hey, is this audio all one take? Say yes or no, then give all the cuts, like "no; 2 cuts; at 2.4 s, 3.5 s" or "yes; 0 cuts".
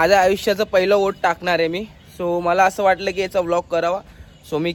yes; 0 cuts